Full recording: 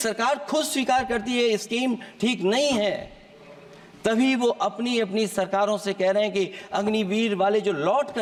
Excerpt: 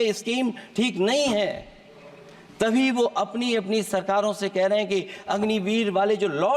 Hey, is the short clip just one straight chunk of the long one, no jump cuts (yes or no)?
yes